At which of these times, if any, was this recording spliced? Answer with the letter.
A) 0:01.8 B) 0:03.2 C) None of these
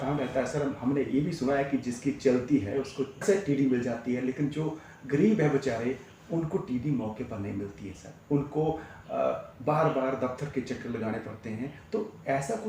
B